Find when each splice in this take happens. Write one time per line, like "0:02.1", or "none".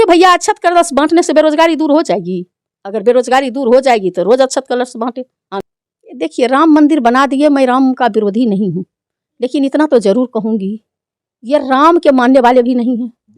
0:05.6